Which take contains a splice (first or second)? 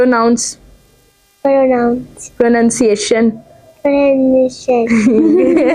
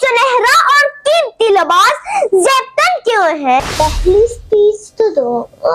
second